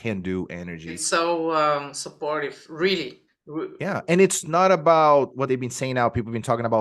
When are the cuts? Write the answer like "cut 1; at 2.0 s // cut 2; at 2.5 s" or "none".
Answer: none